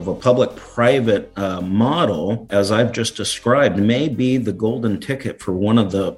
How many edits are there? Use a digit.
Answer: 1